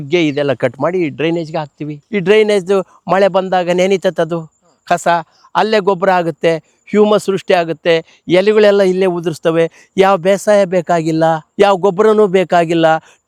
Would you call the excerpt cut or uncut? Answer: uncut